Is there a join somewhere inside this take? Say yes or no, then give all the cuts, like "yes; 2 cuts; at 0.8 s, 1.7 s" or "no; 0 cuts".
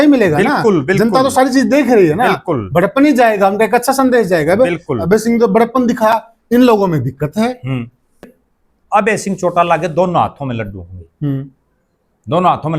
yes; 1 cut; at 8.4 s